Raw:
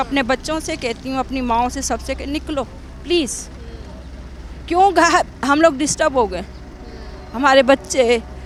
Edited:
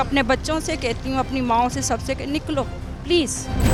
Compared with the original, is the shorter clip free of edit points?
yes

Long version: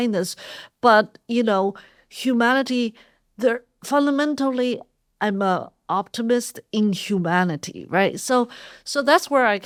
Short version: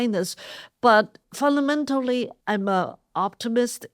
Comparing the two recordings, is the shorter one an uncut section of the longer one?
no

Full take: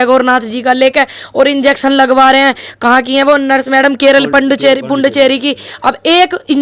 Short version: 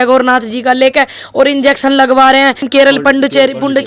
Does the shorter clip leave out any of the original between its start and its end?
yes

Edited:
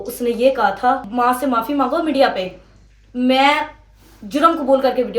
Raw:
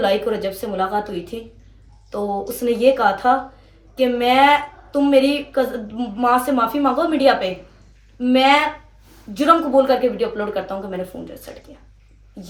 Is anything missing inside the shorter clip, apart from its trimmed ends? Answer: yes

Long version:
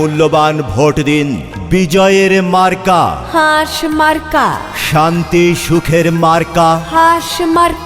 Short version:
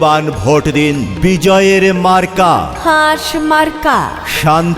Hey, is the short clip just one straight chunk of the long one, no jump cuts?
no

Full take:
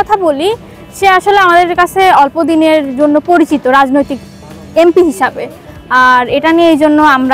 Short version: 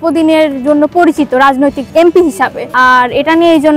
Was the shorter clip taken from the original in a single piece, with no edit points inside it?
no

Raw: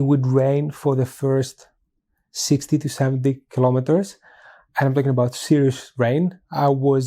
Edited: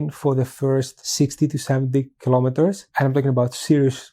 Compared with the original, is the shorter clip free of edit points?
no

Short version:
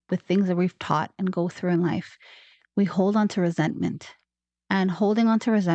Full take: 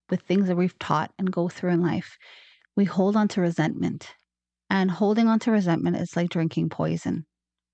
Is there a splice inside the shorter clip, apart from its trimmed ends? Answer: no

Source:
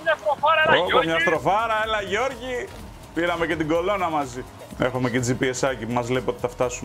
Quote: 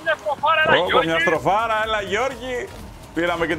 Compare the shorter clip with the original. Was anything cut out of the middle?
no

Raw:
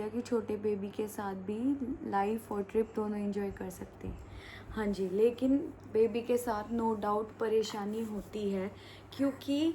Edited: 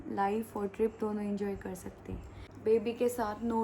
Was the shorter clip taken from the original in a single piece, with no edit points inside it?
no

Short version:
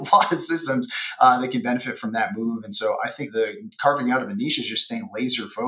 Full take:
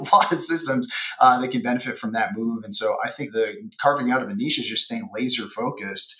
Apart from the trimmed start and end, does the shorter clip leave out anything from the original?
no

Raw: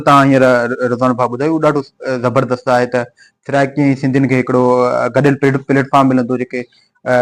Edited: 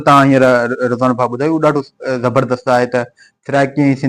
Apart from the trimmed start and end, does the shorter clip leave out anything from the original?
no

